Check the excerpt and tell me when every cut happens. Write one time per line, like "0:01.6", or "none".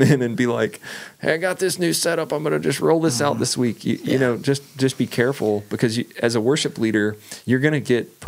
none